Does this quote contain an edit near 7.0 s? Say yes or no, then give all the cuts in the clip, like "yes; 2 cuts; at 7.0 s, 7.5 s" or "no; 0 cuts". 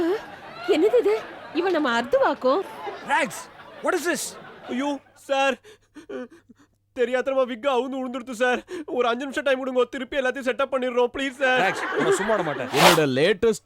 no; 1 cut; at 12.6 s